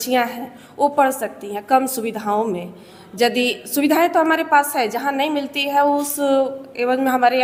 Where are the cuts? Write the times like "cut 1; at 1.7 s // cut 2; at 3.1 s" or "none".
none